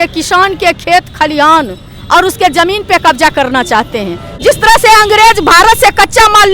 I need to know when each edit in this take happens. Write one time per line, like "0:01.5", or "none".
0:04.4